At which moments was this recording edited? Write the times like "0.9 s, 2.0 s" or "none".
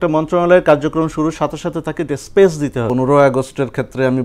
2.9 s